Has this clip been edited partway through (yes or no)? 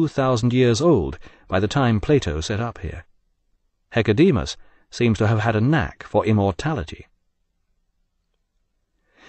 yes